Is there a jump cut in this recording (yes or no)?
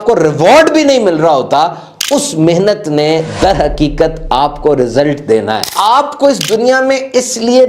yes